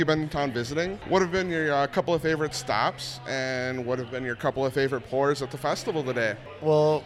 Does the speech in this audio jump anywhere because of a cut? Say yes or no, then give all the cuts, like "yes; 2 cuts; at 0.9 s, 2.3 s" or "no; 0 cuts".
yes; 1 cut; at 1.0 s